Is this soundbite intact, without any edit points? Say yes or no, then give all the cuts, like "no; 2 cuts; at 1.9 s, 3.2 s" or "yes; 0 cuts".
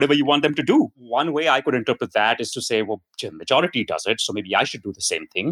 no; 1 cut; at 1.0 s